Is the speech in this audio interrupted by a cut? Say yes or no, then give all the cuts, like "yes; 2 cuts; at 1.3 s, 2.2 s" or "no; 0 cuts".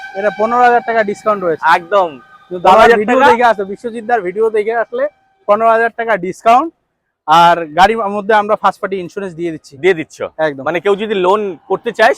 no; 0 cuts